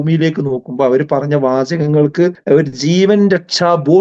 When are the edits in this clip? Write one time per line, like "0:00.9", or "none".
0:02.4